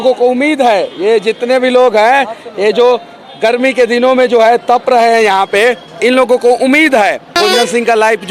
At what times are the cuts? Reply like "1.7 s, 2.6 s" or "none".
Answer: 7.3 s